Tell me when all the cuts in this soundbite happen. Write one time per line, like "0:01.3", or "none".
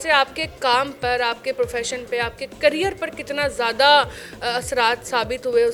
none